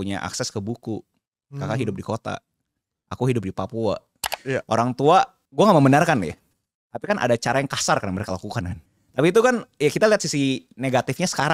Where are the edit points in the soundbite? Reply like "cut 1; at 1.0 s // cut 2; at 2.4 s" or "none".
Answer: cut 1; at 4.3 s // cut 2; at 5.4 s // cut 3; at 8.8 s